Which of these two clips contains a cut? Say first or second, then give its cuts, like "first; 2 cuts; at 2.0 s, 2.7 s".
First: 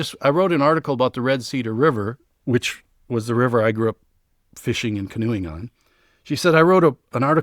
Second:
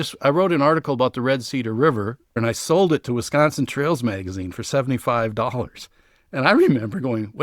second; 1 cut; at 2.4 s